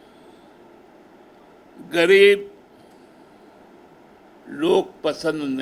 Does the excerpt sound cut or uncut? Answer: uncut